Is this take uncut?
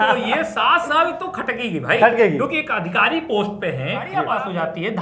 no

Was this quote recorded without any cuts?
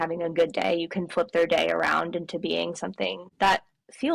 no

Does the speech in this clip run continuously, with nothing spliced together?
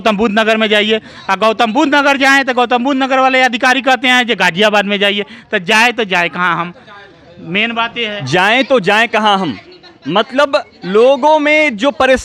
yes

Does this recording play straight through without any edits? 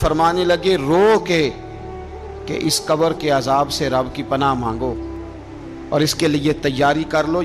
yes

